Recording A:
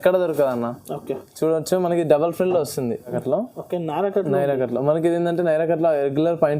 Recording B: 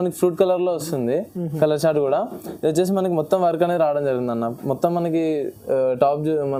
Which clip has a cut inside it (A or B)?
A